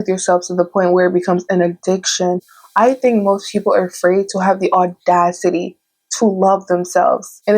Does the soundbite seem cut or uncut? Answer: cut